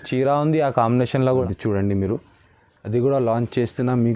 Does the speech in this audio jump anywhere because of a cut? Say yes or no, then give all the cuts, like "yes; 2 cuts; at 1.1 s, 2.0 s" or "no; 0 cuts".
yes; 1 cut; at 1.4 s